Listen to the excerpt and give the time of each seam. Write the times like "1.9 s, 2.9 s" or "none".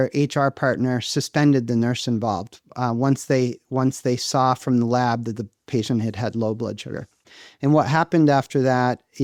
none